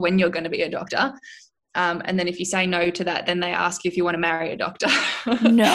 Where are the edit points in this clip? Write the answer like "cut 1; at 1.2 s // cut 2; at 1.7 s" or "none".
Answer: none

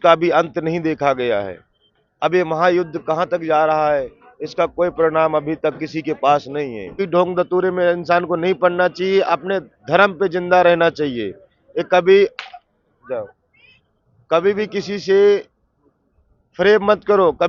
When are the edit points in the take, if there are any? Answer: cut 1; at 7.0 s

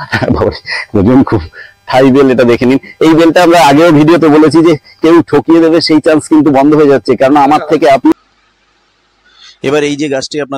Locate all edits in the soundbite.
cut 1; at 8.1 s

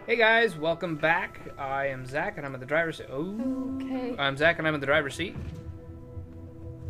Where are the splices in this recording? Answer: cut 1; at 5.3 s

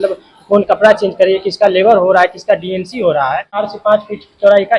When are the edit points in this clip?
cut 1; at 3.7 s

